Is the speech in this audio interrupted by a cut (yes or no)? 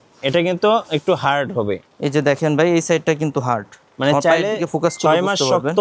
no